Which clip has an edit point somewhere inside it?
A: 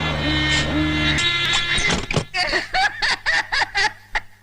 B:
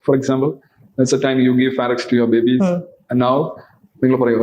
A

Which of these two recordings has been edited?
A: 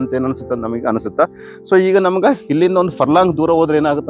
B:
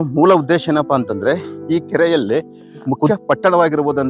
B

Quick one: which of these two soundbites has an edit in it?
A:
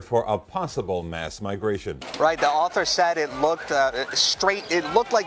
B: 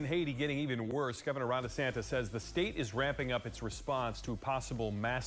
A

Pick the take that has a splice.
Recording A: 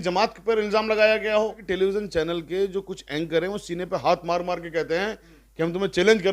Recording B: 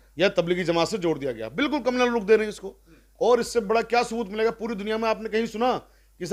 A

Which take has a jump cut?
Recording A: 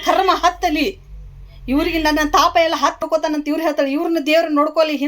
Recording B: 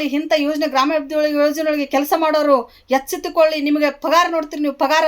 A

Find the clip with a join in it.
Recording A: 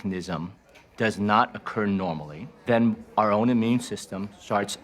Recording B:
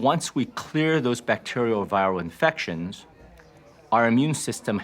A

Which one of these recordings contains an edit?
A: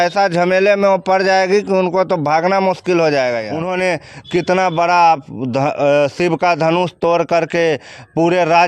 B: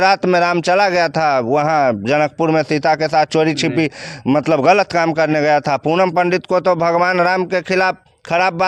A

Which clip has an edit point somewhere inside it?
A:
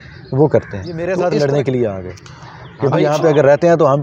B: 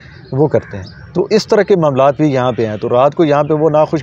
A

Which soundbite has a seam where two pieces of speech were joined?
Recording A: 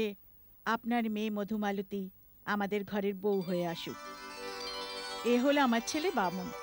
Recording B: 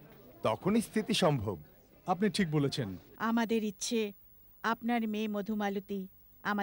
B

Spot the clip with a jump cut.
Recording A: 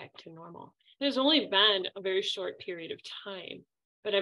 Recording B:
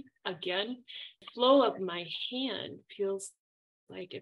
B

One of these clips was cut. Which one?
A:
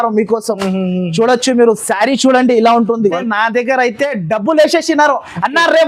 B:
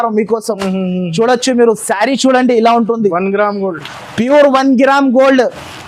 A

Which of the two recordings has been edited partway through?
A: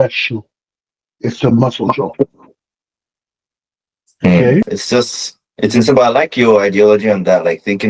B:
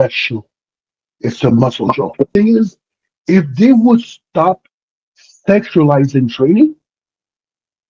B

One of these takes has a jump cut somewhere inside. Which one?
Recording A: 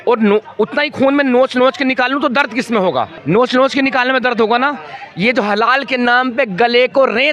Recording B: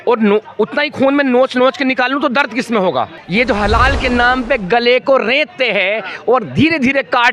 B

